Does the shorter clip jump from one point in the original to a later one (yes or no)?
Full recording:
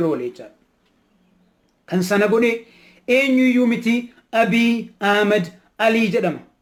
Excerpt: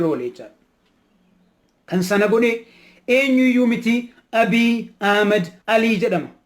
yes